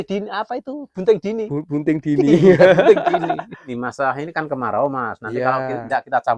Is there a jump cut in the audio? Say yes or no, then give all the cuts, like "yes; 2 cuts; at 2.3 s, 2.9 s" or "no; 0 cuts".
yes; 1 cut; at 3.7 s